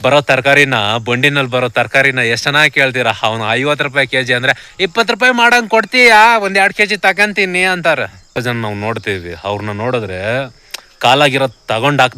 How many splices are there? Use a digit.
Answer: 1